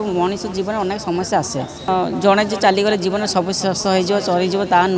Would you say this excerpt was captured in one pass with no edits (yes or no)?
no